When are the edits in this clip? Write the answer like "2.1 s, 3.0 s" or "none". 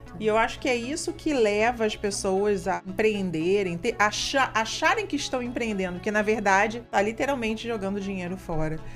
2.8 s, 6.8 s